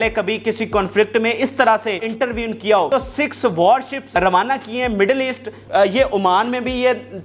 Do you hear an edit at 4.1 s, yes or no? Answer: yes